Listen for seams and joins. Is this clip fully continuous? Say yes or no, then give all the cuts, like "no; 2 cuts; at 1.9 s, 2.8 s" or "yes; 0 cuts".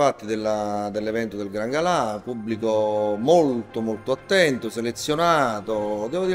yes; 0 cuts